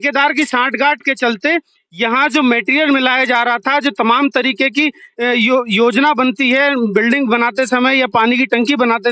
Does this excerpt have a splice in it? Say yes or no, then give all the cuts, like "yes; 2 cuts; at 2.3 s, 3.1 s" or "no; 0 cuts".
no; 0 cuts